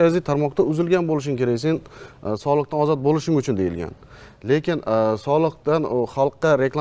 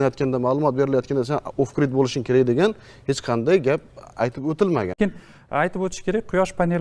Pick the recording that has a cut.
second; 1 cut; at 5.0 s

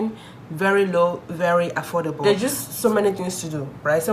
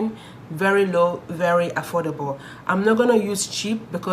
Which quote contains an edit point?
first; 1 cut; at 2.2 s

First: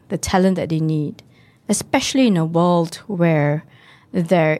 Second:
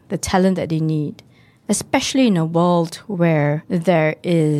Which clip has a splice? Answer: second; 1 cut; at 3.6 s

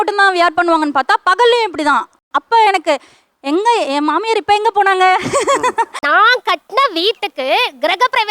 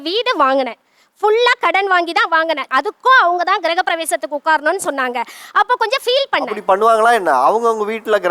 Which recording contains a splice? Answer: first; 1 cut; at 6.0 s

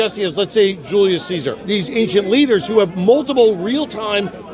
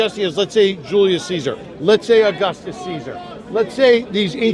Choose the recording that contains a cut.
first; 1 cut; at 1.6 s

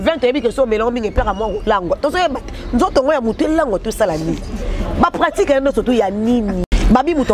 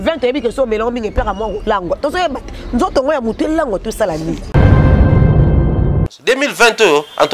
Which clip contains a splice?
second; 1 cut; at 4.5 s

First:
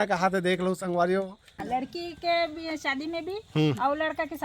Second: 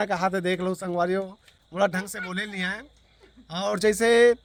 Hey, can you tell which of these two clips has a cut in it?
first; 1 cut; at 1.6 s

